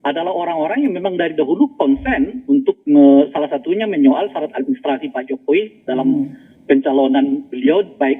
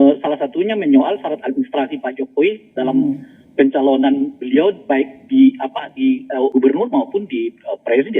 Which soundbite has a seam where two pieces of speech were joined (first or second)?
second